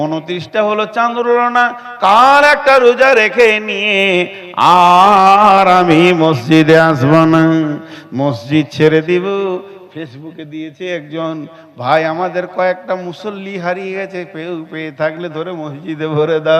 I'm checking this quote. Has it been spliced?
no; 0 cuts

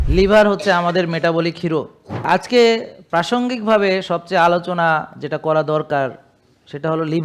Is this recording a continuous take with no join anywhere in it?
no; 1 cut; at 2.2 s

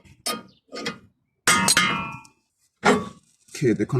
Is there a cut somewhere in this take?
yes; 1 cut; at 2.5 s

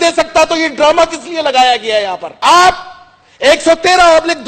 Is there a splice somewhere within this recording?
no; 0 cuts

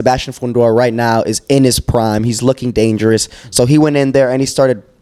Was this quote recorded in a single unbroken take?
yes; 0 cuts

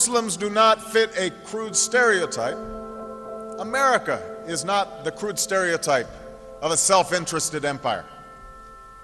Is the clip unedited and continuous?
yes; 0 cuts

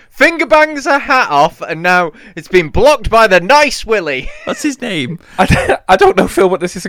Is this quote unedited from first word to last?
no; 2 cuts; at 4.3 s, 5.2 s

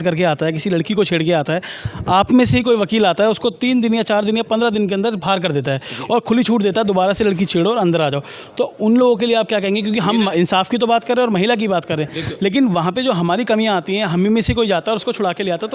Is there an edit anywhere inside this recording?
no; 0 cuts

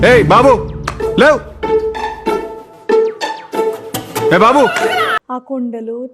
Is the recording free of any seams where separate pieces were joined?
no; 1 cut; at 5.1 s

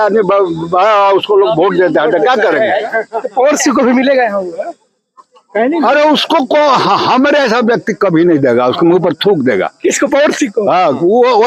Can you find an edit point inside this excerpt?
no; 0 cuts

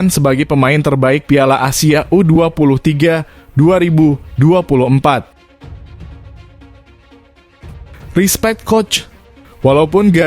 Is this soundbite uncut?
no; 2 cuts; at 5.4 s, 8.1 s

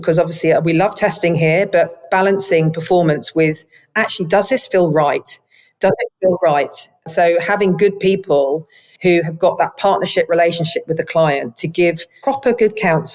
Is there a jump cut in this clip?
yes; 1 cut; at 12.1 s

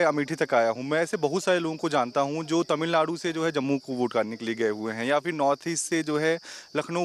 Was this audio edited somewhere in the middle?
no; 0 cuts

